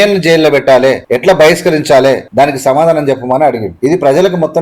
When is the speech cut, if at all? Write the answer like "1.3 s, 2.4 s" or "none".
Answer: 1.0 s, 2.2 s, 3.7 s